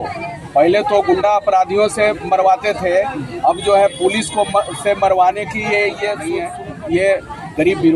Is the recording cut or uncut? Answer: cut